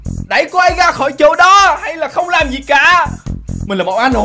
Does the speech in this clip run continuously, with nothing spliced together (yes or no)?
yes